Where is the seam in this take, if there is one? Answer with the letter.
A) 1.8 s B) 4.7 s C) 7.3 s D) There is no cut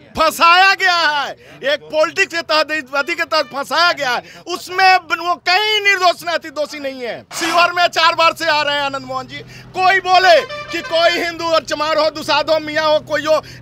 C